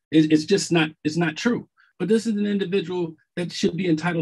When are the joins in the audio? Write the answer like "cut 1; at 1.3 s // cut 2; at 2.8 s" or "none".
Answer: cut 1; at 1.9 s